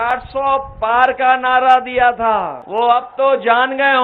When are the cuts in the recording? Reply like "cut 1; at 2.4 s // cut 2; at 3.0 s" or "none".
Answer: cut 1; at 2.6 s

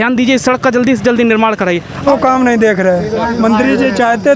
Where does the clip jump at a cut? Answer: cut 1; at 2.0 s

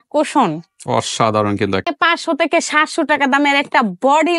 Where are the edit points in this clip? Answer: cut 1; at 1.8 s

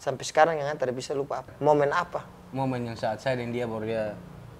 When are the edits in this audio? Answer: cut 1; at 1.5 s

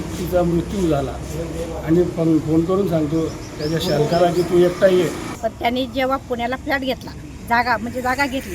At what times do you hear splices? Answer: cut 1; at 5.3 s

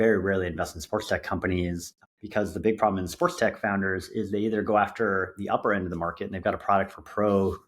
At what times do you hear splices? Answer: cut 1; at 1.9 s

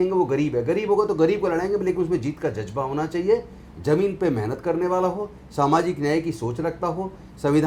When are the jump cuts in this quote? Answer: none

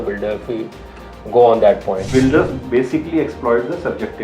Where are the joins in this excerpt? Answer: cut 1; at 2.1 s

